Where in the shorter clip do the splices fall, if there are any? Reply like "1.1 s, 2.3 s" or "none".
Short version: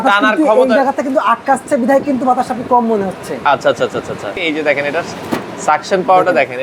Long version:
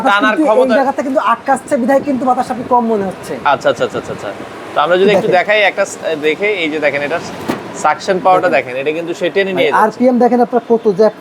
4.4 s